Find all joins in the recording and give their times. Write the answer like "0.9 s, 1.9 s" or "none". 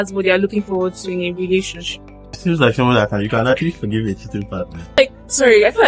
2.3 s, 5.0 s